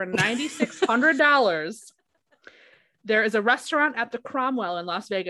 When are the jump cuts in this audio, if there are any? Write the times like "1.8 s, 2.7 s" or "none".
none